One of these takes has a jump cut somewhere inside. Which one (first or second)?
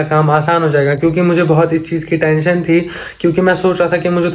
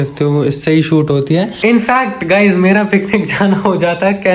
second